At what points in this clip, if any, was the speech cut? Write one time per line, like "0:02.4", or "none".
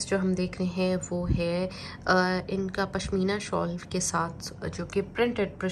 none